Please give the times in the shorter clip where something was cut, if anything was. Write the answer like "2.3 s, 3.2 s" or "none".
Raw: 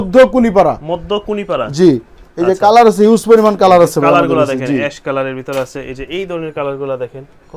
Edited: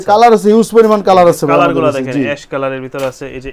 none